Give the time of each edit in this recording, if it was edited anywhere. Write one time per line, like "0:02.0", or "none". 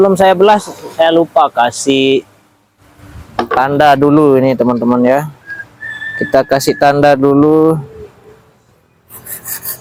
none